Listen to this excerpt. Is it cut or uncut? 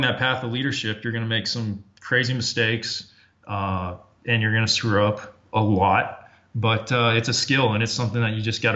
uncut